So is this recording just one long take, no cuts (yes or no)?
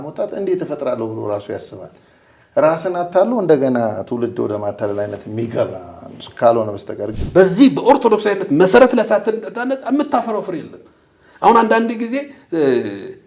no